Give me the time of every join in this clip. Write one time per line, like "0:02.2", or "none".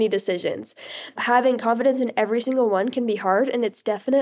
0:01.2